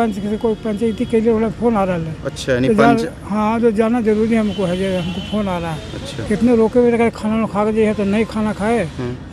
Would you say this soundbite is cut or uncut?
uncut